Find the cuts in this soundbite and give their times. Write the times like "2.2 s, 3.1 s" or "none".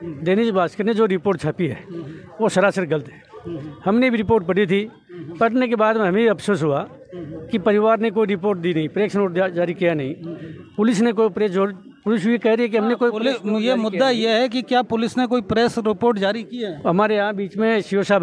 none